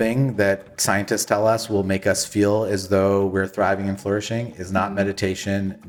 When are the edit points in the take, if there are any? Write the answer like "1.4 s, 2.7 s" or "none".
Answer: none

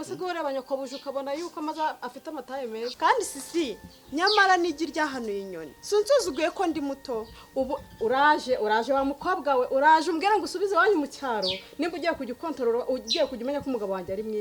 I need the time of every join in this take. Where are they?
2.9 s

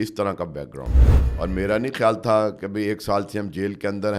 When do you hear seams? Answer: 1.1 s

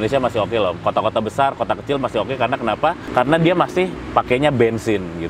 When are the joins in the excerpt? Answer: 3.0 s, 4.0 s

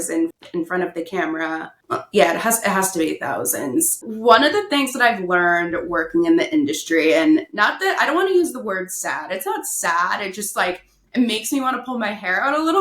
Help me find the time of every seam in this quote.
1.7 s, 4.0 s

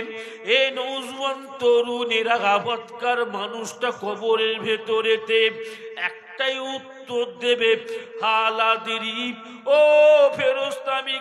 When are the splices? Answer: 2.6 s

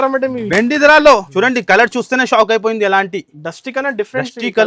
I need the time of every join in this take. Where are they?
1.3 s

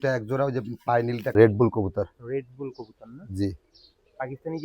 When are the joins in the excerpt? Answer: 1.2 s

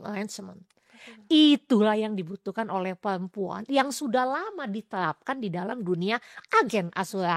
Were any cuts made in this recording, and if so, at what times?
none

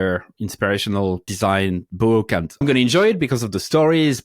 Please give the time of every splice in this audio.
1.3 s, 2.6 s

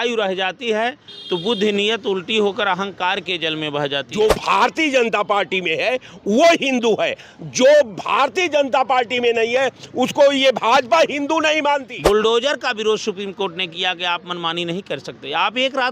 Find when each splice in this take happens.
4.1 s, 11.9 s

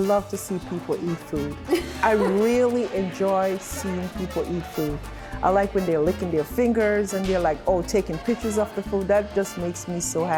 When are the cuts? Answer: none

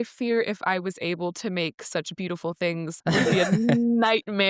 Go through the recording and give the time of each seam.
2.9 s

